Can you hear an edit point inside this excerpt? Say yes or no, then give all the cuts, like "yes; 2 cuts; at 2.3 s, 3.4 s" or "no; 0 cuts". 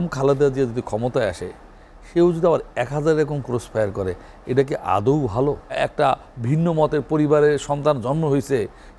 yes; 1 cut; at 5.7 s